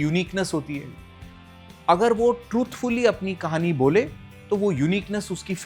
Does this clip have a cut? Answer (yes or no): no